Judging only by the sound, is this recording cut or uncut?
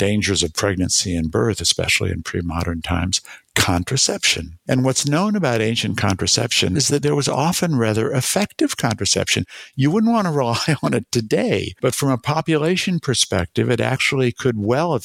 uncut